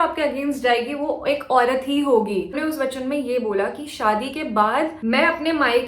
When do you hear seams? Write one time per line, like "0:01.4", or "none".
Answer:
0:02.5